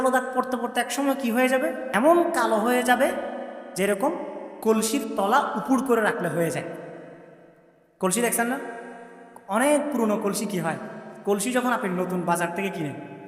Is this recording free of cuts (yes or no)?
no